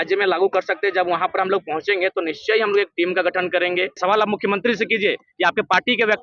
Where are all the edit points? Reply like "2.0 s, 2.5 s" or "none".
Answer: 4.0 s